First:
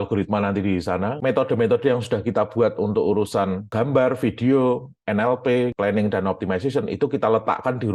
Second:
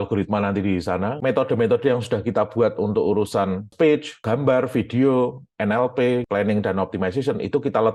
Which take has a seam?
first; 1 cut; at 3.6 s

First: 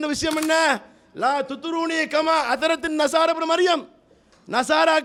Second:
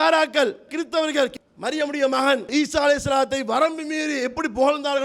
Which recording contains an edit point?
second; 2 cuts; at 1.4 s, 2.5 s

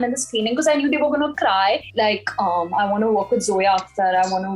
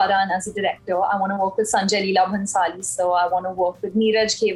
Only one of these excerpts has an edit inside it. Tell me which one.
first; 1 cut; at 1.9 s

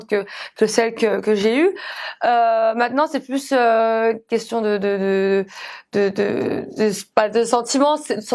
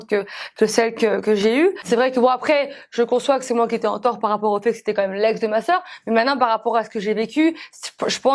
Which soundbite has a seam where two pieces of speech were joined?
second; 1 cut; at 1.8 s

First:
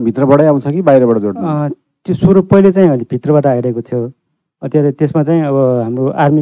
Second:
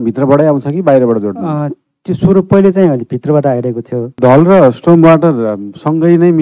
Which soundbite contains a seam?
second; 1 cut; at 4.2 s

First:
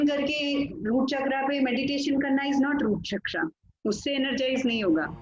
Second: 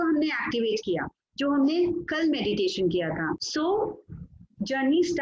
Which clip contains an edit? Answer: second; 1 cut; at 3.4 s

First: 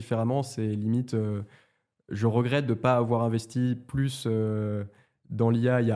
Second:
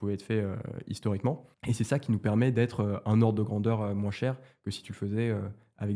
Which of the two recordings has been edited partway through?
second; 1 cut; at 1.5 s

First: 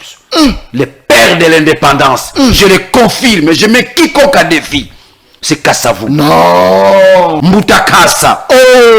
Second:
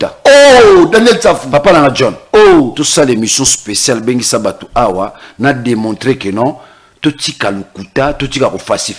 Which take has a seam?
first; 1 cut; at 7.4 s

